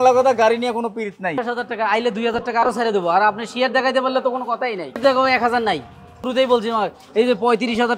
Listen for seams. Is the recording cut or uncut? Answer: cut